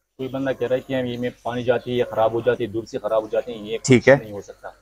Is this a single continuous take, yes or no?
yes